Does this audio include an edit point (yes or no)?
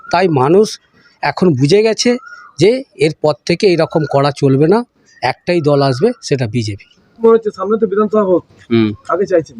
yes